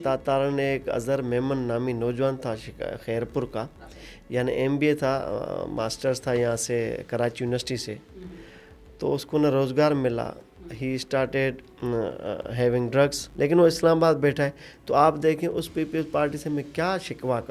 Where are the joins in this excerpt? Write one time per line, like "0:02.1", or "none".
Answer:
0:13.2

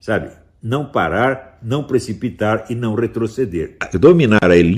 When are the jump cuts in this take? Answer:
0:03.8

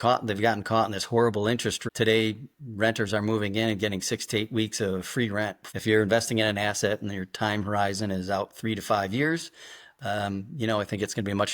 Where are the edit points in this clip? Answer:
0:01.8
0:05.6

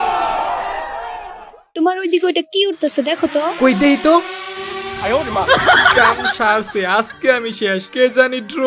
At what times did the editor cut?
0:01.7

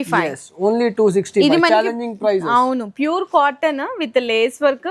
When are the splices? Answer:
none

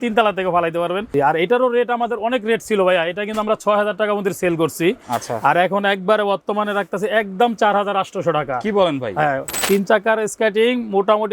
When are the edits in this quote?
0:01.1
0:09.6

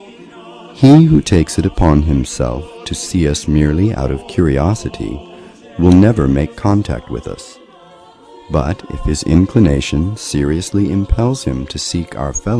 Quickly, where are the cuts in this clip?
0:04.6

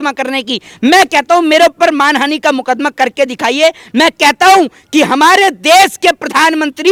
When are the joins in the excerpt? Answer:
none

